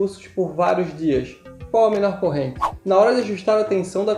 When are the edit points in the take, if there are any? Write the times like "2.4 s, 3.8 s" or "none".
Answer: 2.7 s